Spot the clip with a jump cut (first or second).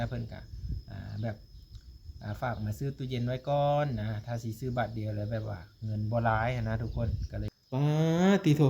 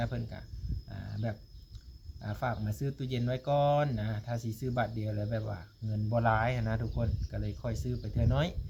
first